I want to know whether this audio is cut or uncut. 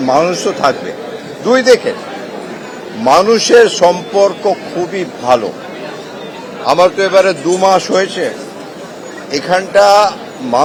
uncut